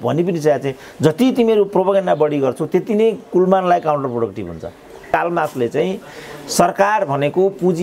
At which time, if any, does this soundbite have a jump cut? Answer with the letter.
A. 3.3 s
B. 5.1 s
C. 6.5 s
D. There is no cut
B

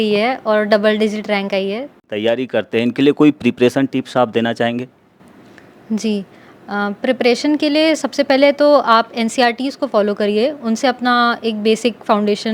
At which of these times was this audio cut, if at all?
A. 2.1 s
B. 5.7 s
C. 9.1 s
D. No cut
A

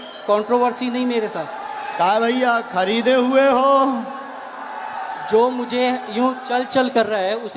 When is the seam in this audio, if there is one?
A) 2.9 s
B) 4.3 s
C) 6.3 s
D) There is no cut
D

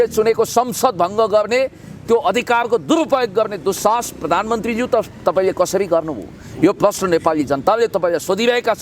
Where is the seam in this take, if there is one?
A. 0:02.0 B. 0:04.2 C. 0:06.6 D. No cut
D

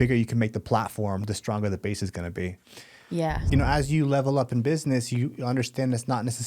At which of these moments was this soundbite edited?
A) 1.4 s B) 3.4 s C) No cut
B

